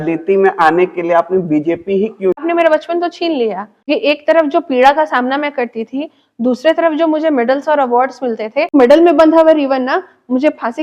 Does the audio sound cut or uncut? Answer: cut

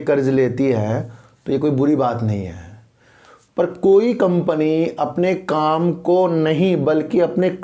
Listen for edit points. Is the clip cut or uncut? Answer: uncut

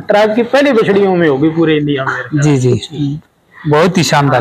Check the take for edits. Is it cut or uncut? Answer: uncut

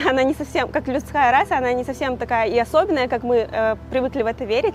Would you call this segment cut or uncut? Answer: uncut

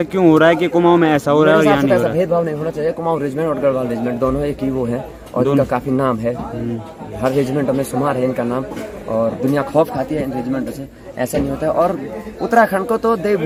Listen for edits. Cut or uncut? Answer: uncut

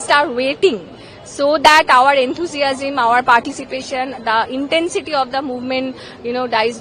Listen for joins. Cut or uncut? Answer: uncut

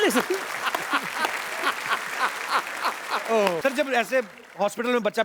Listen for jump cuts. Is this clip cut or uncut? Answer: cut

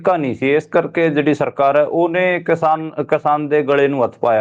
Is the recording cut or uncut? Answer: uncut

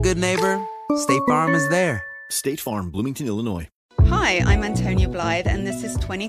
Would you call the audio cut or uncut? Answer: uncut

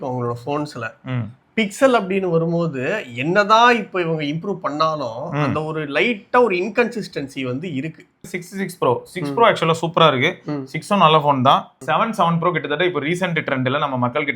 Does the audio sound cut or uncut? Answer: cut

